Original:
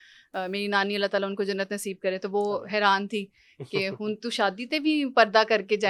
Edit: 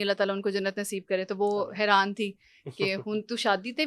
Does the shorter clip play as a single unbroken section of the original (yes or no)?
yes